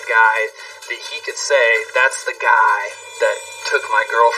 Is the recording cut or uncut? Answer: cut